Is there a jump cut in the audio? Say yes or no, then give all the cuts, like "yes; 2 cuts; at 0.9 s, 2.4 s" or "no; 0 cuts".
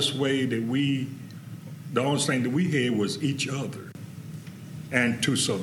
yes; 1 cut; at 3.9 s